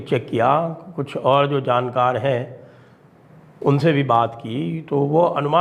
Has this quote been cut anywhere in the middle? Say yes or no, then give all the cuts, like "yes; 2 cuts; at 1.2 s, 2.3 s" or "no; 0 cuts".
no; 0 cuts